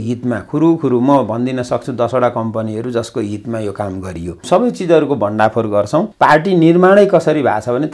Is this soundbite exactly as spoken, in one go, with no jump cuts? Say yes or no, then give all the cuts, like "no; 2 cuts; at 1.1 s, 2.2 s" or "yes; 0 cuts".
no; 2 cuts; at 4.4 s, 6.1 s